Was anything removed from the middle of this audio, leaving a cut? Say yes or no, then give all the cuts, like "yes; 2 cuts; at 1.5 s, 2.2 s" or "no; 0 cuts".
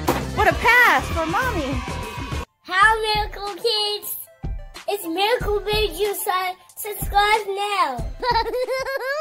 yes; 1 cut; at 2.6 s